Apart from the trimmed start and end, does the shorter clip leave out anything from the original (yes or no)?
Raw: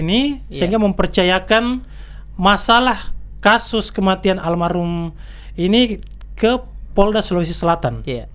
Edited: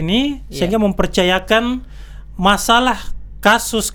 no